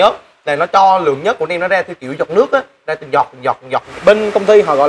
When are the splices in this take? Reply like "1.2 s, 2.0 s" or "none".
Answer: 3.8 s